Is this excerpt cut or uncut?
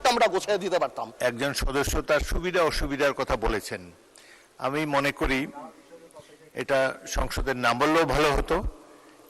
cut